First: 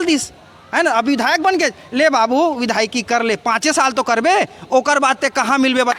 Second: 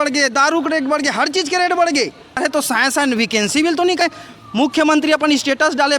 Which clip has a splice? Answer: second; 2 cuts; at 2.4 s, 4.0 s

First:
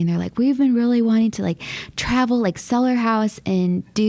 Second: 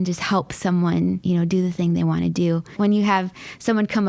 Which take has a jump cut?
second; 2 cuts; at 1.2 s, 2.8 s

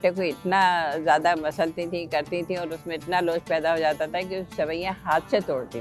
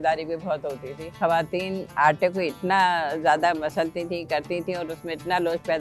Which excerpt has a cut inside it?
second; 1 cut; at 1.2 s

